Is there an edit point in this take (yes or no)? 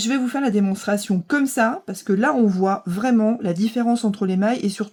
no